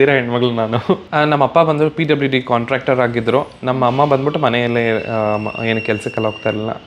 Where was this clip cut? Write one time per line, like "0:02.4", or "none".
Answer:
0:01.1